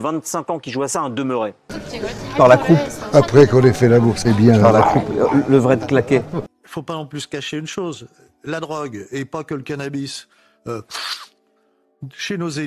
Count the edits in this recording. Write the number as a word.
two